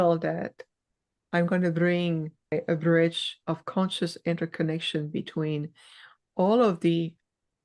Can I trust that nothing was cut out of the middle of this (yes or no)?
no